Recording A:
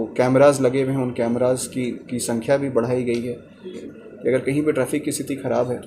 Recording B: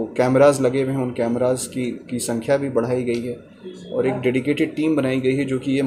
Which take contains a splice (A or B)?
A